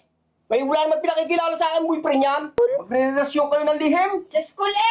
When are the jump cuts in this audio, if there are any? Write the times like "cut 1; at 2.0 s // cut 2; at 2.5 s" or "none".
cut 1; at 2.6 s